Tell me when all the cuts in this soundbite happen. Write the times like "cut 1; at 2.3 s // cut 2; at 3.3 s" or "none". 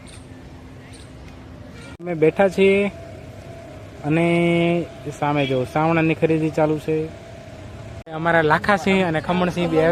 cut 1; at 1.9 s // cut 2; at 8.0 s